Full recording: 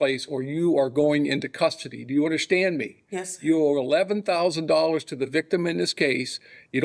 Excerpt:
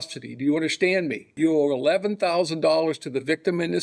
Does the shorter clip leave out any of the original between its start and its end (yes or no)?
yes